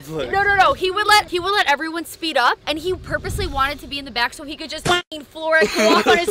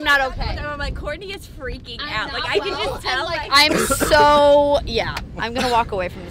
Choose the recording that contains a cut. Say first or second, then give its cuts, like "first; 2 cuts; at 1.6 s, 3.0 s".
first; 3 cuts; at 1.3 s, 2.6 s, 5.1 s